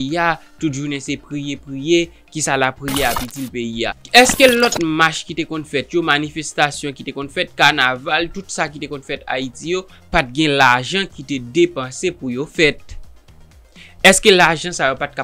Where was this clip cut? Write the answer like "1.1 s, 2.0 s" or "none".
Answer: 4.0 s